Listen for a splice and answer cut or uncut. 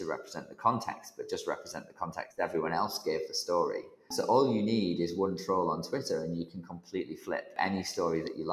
cut